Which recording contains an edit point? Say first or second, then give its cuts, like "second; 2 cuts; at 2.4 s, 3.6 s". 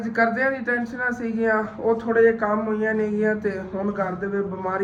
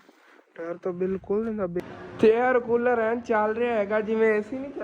second; 1 cut; at 1.8 s